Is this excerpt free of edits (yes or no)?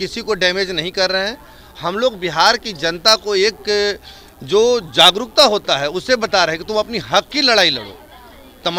yes